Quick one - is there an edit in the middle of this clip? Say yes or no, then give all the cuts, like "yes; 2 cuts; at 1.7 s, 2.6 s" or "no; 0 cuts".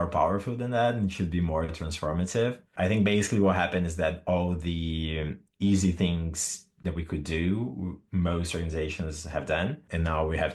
no; 0 cuts